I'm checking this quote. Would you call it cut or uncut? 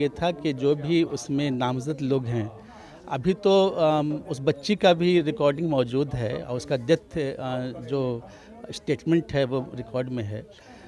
uncut